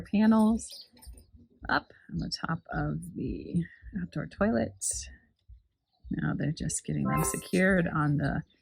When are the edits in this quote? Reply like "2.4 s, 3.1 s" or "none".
none